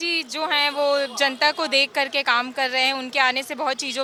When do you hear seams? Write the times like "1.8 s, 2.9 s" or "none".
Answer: none